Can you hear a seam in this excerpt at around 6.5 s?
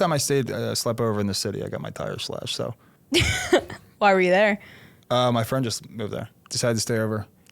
yes; 2 cuts; at 2.9 s, 6.5 s

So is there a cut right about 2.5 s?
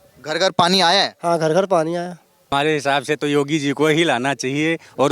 yes; 1 cut; at 2.5 s

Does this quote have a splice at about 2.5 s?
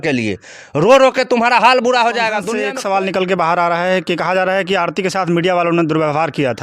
yes; 1 cut; at 2.5 s

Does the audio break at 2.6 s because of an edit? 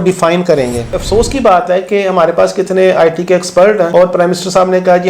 no; 2 cuts; at 0.9 s, 3.9 s

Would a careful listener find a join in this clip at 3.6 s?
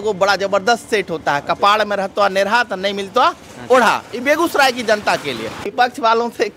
no; 1 cut; at 5.6 s

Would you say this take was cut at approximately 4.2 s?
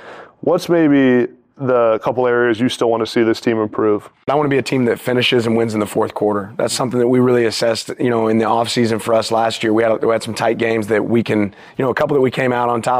yes; 1 cut; at 4.2 s

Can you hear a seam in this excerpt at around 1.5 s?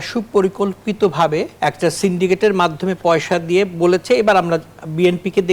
yes; 1 cut; at 1.5 s

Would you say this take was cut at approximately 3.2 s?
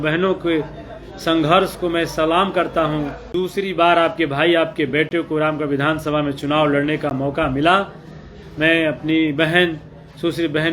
yes; 1 cut; at 3.2 s

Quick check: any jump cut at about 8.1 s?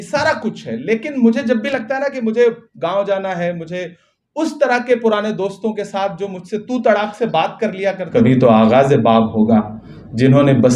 yes; 1 cut; at 8.1 s

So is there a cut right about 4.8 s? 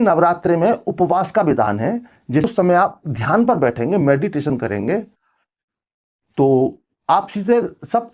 no; 1 cut; at 2.5 s

